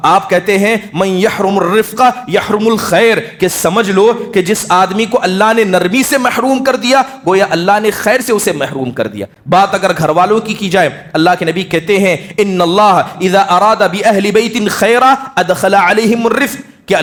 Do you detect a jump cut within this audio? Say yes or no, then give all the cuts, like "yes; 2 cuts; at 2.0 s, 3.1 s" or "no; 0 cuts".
no; 0 cuts